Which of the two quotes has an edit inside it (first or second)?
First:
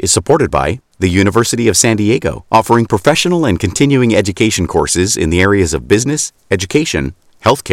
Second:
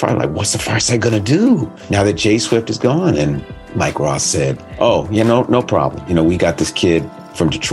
second